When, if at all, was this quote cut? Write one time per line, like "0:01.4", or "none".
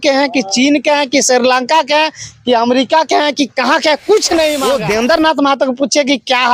0:04.6